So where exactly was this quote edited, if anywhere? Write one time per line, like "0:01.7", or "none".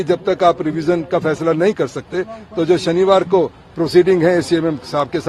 none